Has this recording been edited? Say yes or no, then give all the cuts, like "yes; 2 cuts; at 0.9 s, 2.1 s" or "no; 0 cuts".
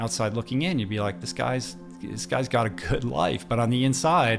no; 0 cuts